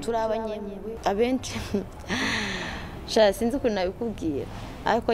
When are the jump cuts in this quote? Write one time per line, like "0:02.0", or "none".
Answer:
0:00.9